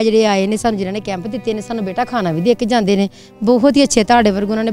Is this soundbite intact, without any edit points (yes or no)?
yes